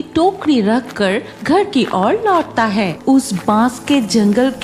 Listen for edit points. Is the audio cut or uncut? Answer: cut